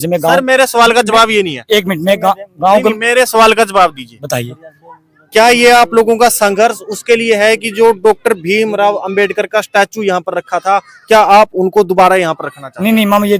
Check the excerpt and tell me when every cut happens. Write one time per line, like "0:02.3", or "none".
none